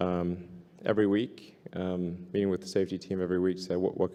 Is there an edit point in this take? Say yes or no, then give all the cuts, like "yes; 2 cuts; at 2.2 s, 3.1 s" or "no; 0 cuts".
no; 0 cuts